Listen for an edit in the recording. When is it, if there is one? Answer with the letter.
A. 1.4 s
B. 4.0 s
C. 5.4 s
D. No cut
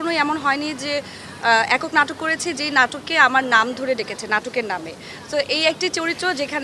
D